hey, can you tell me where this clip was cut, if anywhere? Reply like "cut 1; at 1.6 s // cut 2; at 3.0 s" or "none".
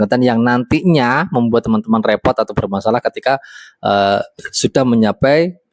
none